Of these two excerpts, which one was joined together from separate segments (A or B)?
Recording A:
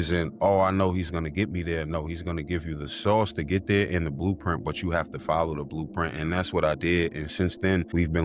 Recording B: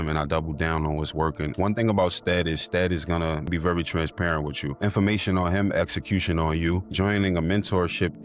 B